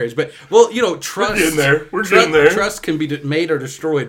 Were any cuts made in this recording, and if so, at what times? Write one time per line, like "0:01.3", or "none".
none